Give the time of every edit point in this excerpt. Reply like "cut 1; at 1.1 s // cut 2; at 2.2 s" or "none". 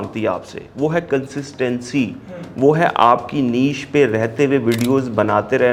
none